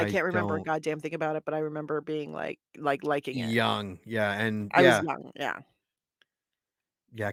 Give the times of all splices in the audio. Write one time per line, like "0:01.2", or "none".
none